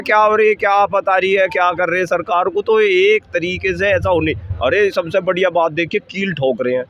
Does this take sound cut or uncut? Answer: uncut